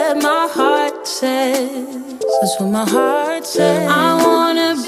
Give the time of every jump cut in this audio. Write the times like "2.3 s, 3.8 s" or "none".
none